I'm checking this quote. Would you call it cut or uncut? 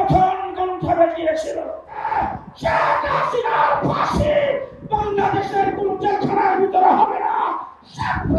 cut